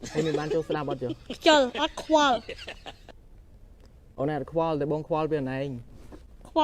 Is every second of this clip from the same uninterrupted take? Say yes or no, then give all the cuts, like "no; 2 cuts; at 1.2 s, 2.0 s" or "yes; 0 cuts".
yes; 0 cuts